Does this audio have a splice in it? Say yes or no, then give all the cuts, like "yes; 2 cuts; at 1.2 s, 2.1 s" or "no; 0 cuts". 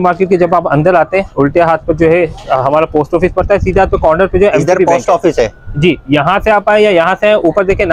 no; 0 cuts